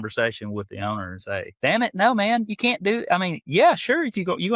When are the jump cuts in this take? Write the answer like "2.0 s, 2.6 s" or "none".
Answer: 1.5 s